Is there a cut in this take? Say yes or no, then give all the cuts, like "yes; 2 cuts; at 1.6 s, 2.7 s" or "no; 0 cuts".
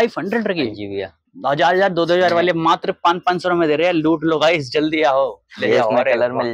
no; 0 cuts